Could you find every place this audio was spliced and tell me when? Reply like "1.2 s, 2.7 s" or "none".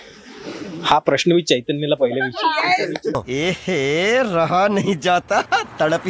3.1 s